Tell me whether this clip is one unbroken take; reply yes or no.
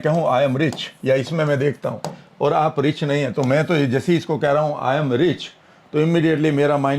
yes